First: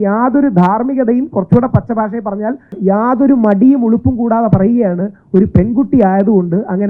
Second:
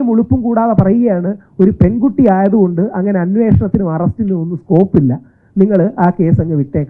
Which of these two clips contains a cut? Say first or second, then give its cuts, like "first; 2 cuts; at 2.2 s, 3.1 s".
first; 1 cut; at 2.7 s